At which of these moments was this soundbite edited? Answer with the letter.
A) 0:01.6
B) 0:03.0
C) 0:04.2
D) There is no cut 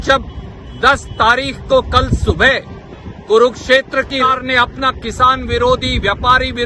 C